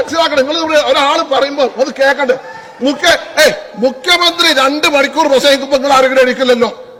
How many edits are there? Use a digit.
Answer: 0